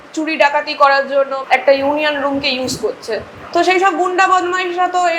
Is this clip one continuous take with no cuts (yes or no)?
no